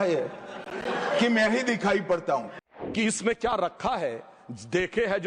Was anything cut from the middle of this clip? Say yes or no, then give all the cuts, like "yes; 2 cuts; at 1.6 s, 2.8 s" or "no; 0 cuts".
yes; 1 cut; at 2.6 s